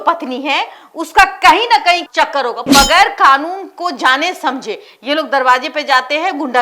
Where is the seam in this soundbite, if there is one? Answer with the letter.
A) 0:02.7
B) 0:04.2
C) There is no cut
A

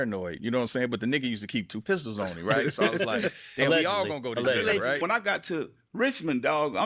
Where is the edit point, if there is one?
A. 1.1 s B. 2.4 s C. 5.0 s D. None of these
C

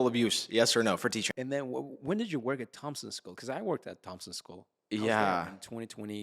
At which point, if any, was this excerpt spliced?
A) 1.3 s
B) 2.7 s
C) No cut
A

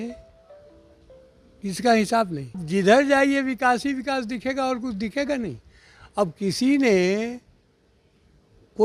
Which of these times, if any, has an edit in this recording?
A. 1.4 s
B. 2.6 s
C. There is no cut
B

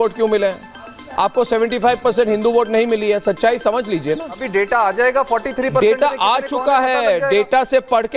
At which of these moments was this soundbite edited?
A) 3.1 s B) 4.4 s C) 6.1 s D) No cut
B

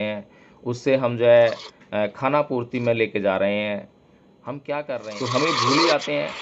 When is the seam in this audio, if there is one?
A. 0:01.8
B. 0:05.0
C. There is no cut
B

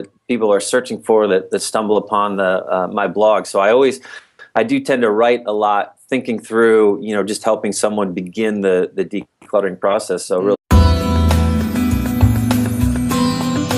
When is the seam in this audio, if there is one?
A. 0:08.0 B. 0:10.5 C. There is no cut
C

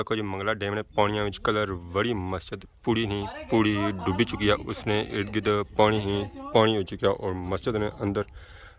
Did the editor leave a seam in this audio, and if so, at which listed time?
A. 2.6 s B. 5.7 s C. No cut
C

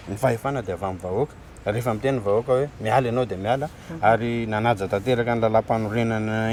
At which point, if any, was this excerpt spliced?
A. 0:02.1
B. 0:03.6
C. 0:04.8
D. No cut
D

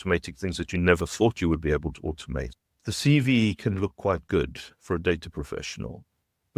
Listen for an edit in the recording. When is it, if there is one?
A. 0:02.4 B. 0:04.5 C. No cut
A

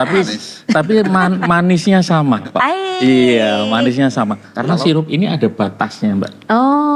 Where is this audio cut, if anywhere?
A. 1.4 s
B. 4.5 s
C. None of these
B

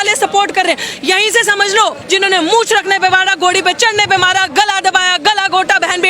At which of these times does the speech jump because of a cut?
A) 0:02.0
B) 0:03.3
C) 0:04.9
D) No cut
A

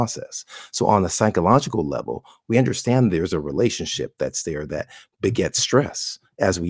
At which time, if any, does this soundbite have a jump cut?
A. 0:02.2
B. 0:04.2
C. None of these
C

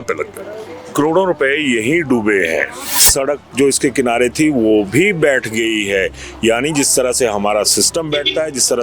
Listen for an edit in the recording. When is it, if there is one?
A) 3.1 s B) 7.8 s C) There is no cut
A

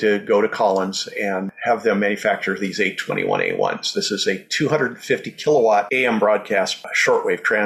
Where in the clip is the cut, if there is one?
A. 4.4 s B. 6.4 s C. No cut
C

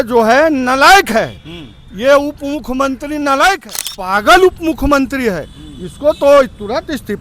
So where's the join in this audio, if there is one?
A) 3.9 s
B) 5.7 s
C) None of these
A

